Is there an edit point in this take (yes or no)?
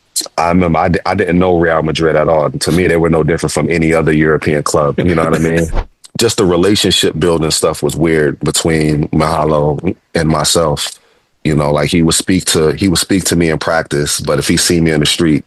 yes